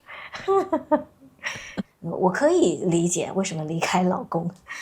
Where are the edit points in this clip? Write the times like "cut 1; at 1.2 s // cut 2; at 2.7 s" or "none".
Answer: cut 1; at 2.0 s